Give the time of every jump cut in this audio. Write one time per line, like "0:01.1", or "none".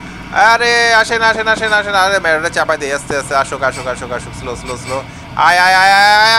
none